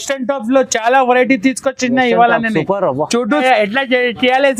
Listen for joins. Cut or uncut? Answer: cut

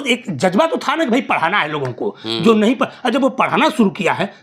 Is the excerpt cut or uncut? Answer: uncut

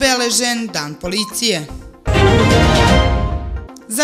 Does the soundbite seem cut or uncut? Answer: uncut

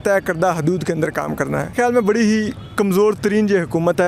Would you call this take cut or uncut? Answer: cut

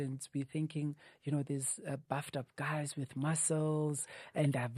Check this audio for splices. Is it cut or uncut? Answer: uncut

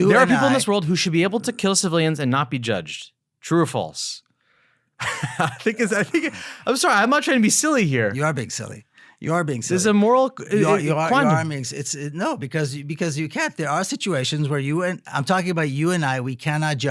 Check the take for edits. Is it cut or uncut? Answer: uncut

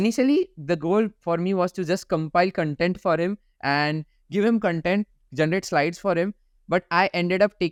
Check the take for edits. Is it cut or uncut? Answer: uncut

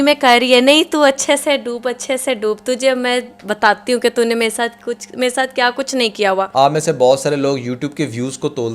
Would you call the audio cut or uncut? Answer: cut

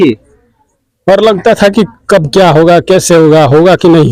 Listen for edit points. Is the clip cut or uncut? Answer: uncut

